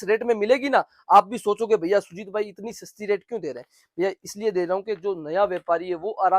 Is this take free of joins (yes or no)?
yes